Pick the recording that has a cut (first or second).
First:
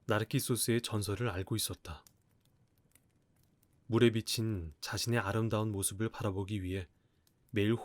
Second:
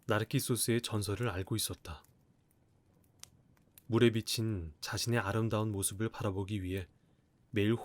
second